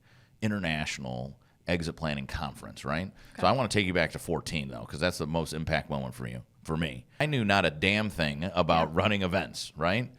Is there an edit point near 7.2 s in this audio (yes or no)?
yes